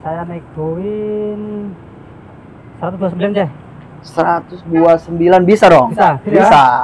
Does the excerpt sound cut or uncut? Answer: uncut